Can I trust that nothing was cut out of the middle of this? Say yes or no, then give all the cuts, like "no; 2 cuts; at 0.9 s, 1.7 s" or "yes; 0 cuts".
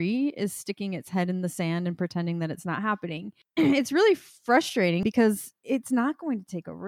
no; 2 cuts; at 3.3 s, 5.0 s